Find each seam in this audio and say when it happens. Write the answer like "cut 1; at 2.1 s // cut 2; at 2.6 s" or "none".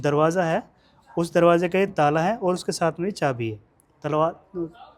none